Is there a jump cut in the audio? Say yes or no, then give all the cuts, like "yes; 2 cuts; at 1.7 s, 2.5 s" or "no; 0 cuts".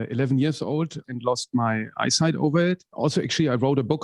yes; 2 cuts; at 1.1 s, 2.9 s